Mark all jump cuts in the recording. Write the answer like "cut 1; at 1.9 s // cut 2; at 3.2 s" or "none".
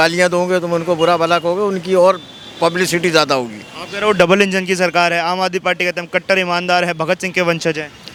none